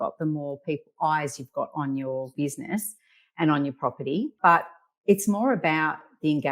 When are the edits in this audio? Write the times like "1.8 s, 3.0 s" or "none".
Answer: 2.3 s, 4.3 s

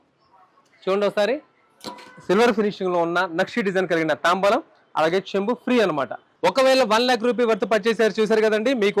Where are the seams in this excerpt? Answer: 6.2 s

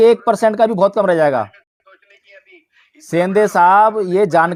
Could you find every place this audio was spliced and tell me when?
none

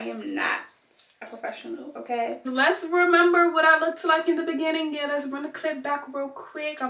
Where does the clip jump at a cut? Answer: 2.4 s

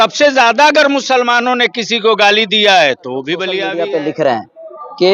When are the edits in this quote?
3.6 s

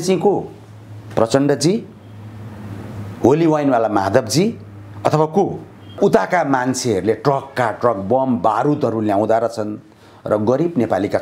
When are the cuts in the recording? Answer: 6.0 s

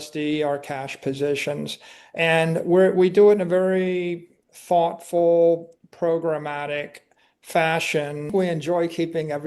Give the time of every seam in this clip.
8.3 s

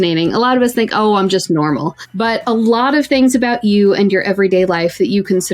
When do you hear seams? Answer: 2.0 s

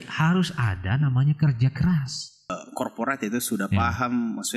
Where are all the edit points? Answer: 2.6 s

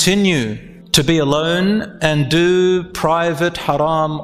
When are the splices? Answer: none

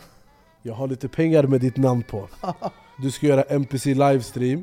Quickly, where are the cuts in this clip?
2.9 s

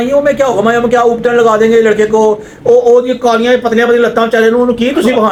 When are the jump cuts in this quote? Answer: none

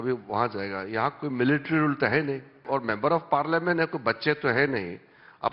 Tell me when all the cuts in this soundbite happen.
2.6 s

